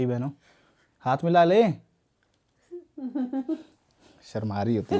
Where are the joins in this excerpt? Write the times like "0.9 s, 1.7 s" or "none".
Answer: none